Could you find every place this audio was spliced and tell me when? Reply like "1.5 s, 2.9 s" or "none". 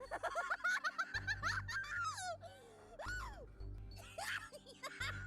3.8 s